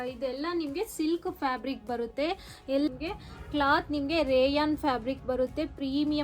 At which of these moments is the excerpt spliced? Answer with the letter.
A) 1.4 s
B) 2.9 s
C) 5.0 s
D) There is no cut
B